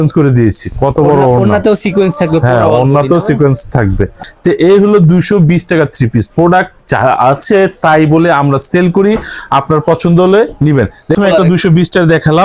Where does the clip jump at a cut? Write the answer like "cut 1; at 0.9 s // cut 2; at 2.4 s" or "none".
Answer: cut 1; at 4.2 s // cut 2; at 11.2 s